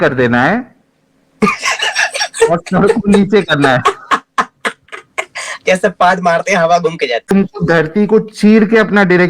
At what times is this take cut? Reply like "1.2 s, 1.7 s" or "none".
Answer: 7.3 s